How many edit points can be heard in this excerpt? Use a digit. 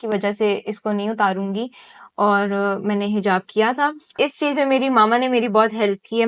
1